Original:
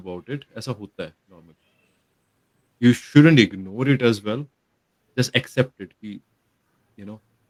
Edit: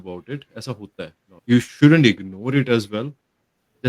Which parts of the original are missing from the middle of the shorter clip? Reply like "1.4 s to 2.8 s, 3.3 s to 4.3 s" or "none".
1.3 s to 2.6 s